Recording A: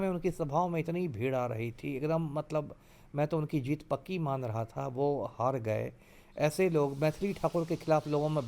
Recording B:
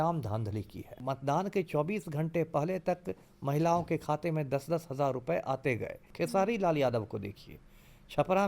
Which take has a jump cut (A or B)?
B